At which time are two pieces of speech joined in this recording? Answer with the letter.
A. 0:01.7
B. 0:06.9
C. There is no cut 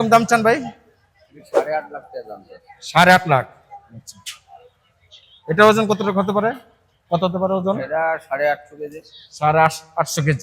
C